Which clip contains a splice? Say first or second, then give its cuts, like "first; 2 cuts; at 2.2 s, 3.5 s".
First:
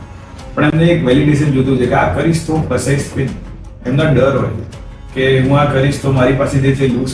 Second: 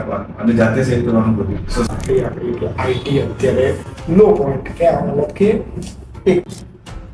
second; 1 cut; at 1.9 s